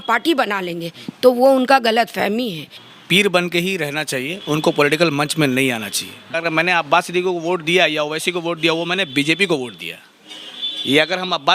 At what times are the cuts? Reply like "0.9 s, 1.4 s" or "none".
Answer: 2.9 s, 6.2 s